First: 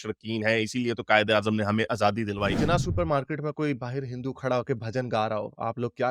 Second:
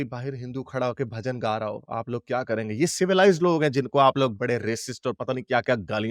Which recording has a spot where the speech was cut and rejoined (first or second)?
first